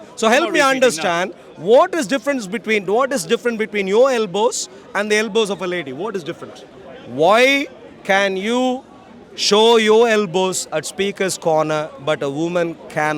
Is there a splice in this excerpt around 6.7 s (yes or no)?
yes